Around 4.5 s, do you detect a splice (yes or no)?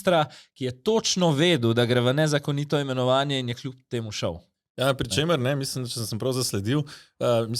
no